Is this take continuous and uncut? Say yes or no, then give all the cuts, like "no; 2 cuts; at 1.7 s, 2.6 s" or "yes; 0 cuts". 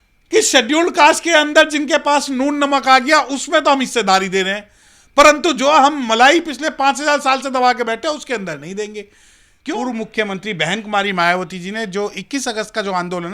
no; 1 cut; at 9.8 s